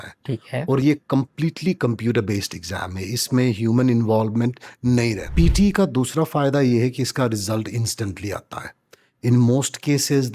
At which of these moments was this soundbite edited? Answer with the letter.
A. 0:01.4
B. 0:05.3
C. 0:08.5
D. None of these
B